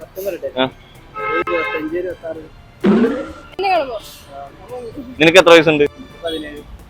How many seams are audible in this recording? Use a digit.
1